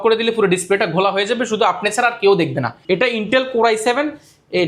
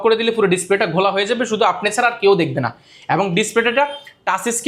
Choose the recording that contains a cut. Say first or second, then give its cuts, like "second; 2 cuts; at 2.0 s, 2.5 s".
first; 1 cut; at 2.8 s